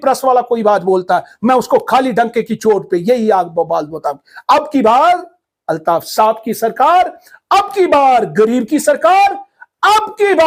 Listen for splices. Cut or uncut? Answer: uncut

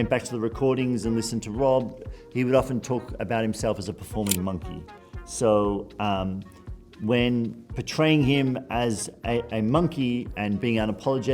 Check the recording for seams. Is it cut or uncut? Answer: uncut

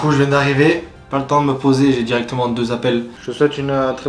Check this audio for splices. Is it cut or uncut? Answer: cut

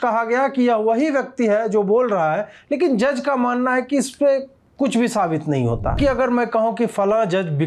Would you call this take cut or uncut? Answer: cut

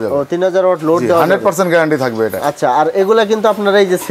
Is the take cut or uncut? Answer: uncut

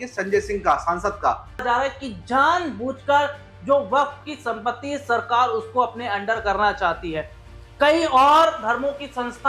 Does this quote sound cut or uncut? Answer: cut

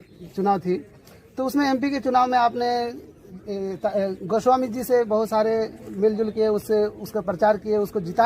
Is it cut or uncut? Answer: uncut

